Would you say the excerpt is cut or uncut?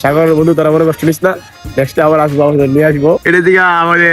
cut